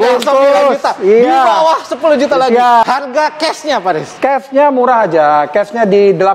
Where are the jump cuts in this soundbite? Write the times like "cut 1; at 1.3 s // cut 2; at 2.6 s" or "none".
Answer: cut 1; at 2.8 s